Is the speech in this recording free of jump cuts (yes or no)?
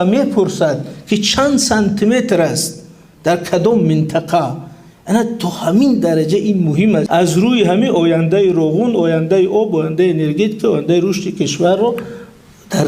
no